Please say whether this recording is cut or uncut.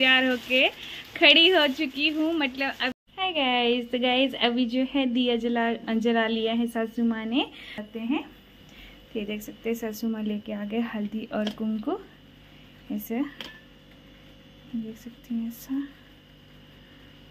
cut